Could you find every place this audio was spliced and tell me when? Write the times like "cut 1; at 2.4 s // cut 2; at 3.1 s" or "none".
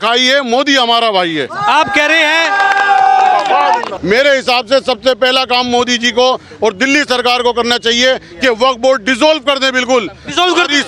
cut 1; at 3.9 s